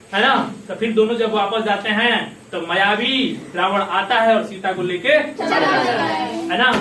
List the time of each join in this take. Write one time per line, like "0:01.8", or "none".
none